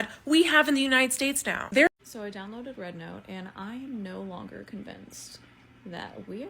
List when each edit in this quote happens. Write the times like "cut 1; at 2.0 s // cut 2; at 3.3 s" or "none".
cut 1; at 1.9 s